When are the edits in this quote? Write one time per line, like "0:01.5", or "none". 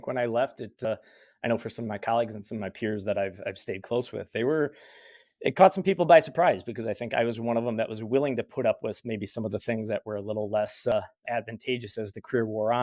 0:00.8
0:10.9

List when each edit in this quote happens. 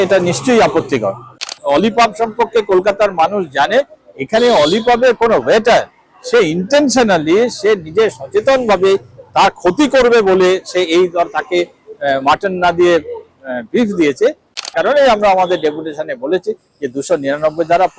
0:01.6
0:14.6

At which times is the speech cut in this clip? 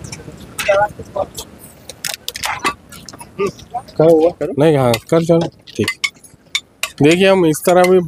0:02.7

